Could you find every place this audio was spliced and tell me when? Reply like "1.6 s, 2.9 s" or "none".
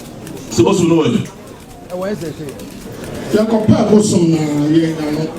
3.1 s